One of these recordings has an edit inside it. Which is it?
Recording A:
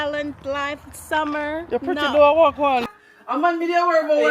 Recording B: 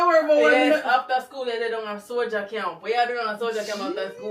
A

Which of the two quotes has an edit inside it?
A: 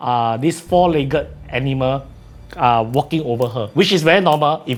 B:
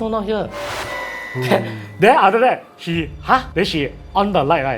B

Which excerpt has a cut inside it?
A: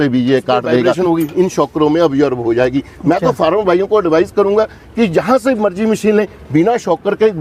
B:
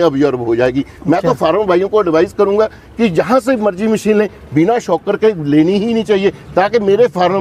A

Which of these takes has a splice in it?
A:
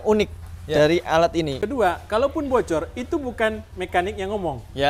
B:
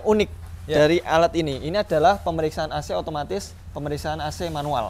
A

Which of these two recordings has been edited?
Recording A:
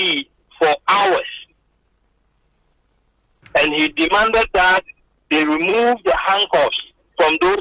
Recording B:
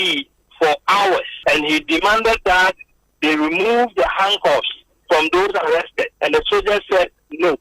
B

